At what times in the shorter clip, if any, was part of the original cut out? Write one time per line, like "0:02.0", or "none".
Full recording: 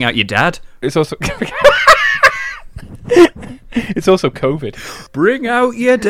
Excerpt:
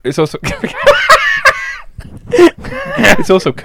none

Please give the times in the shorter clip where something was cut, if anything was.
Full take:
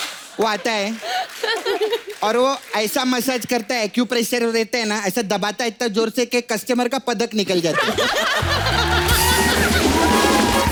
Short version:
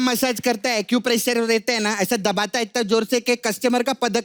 none

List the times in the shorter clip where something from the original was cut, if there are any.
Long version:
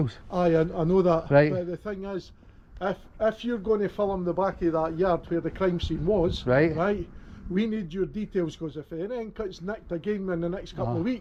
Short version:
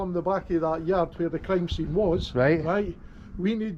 none

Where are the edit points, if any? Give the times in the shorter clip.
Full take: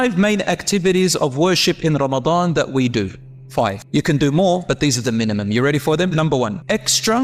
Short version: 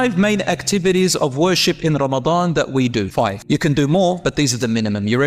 0:03.4

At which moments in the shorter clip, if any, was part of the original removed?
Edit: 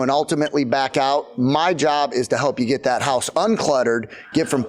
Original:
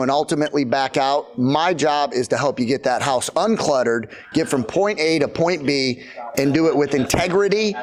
none

